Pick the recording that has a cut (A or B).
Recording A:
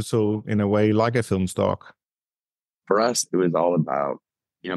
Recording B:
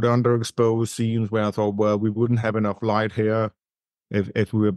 A